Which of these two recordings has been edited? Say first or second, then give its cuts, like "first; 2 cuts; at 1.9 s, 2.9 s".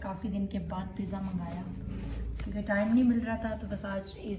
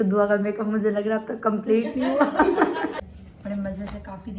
second; 1 cut; at 3.0 s